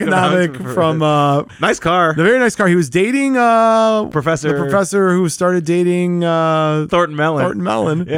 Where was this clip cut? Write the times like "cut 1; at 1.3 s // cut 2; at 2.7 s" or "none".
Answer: cut 1; at 1.5 s // cut 2; at 4.1 s // cut 3; at 6.9 s